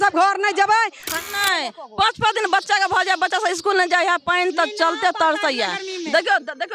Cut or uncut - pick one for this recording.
cut